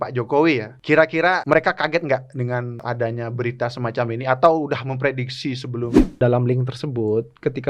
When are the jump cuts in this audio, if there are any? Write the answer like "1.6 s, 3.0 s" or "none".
1.3 s, 2.8 s, 6.2 s